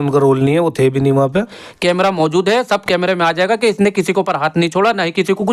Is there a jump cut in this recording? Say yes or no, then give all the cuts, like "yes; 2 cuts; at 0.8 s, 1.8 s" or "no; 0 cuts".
yes; 1 cut; at 1.6 s